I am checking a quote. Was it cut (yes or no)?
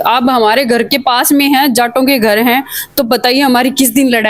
no